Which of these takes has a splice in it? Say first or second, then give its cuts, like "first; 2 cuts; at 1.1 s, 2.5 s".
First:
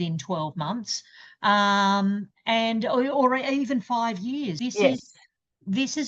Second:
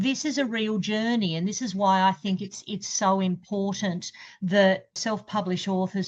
second; 1 cut; at 5.0 s